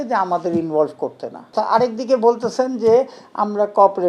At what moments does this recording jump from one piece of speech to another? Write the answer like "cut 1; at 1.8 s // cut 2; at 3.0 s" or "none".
cut 1; at 1.5 s